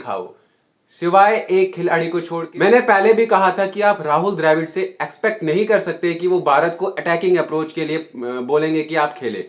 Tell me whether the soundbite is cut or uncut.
cut